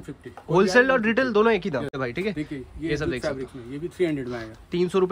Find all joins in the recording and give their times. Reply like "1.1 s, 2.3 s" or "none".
2.0 s